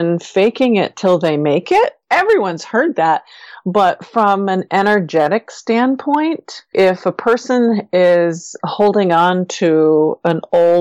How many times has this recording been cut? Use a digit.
2